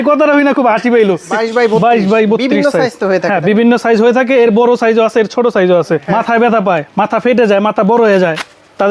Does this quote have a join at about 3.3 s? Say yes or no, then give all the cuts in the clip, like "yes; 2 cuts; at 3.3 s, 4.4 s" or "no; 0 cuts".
no; 2 cuts; at 1.3 s, 6.0 s